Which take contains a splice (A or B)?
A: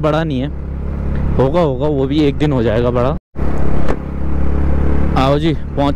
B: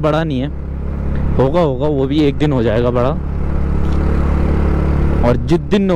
A